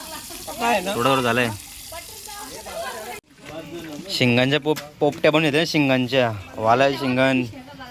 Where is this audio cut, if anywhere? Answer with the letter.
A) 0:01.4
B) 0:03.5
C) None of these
C